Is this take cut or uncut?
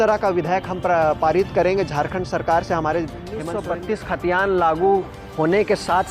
cut